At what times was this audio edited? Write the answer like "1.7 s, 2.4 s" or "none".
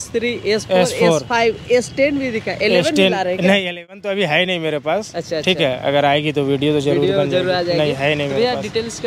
none

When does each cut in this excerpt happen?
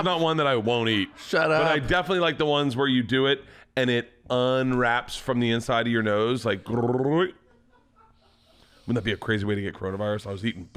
none

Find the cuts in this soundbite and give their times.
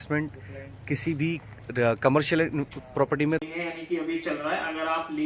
3.4 s

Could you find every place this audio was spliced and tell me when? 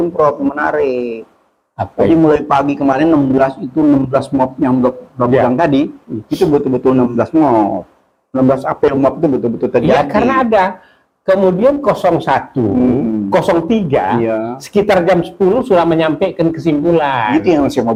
none

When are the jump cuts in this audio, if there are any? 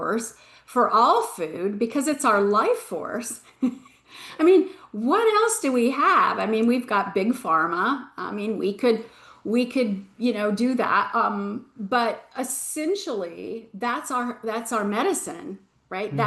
none

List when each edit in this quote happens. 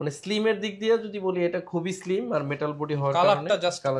none

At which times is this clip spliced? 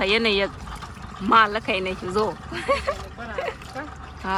none

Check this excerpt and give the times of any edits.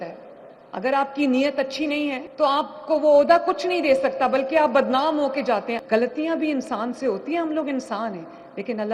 2.2 s, 5.7 s

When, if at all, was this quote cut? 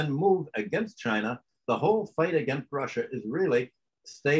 1.4 s

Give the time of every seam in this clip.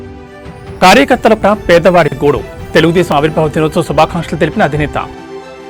none

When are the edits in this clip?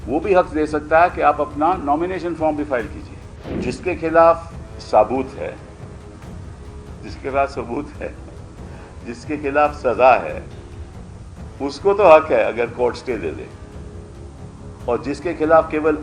3.6 s, 5.6 s, 7.1 s

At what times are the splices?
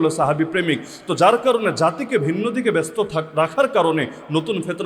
none

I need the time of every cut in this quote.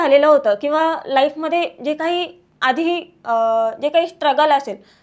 none

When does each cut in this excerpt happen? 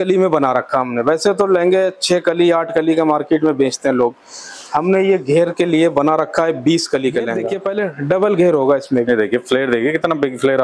7.6 s

